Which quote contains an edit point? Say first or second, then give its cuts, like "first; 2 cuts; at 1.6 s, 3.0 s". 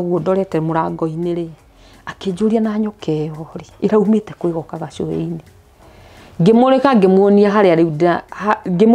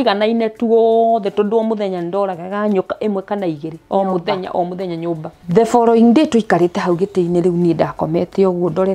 second; 1 cut; at 5.3 s